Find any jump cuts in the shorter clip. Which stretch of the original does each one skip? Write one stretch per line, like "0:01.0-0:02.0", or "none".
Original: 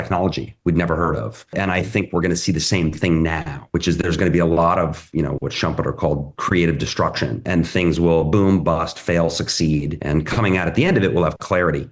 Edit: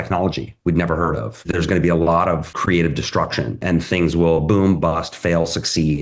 0:01.5-0:04.0
0:05.0-0:06.3